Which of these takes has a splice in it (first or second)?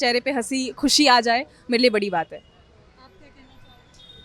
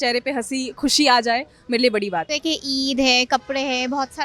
second